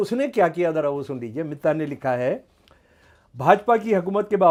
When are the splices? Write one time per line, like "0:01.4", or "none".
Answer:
none